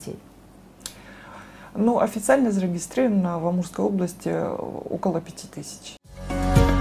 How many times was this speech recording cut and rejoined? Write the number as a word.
one